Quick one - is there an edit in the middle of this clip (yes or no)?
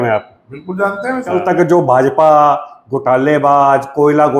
yes